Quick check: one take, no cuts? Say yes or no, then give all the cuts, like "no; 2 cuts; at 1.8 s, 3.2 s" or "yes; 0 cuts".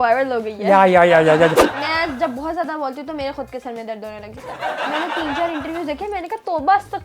no; 2 cuts; at 1.6 s, 4.7 s